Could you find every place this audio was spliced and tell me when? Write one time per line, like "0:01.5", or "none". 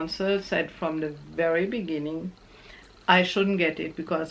none